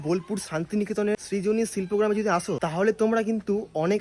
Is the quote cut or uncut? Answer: cut